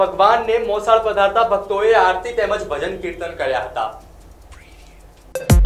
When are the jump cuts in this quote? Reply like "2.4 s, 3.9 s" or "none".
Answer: none